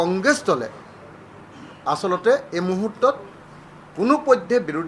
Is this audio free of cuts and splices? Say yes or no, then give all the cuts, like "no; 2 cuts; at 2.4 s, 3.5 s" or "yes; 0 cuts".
yes; 0 cuts